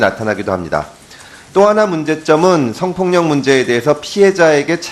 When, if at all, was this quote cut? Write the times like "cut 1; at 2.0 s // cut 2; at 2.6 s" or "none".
cut 1; at 2.5 s